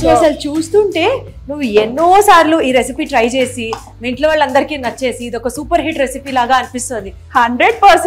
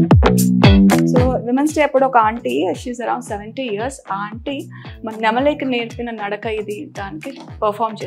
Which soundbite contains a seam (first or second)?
second